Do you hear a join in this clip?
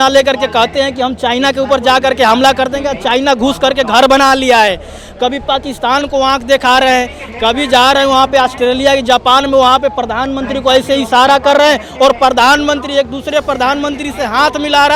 no; 0 cuts

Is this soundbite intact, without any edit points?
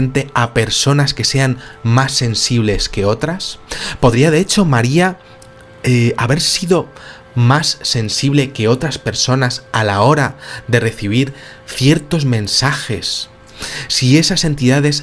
yes; 0 cuts

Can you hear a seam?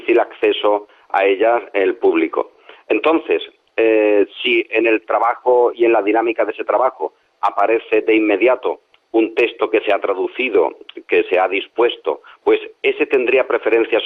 no; 0 cuts

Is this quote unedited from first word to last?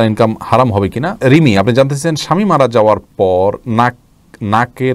no; 1 cut; at 1.2 s

